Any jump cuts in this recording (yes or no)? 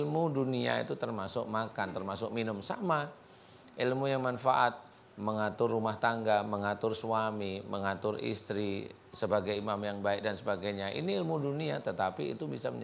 no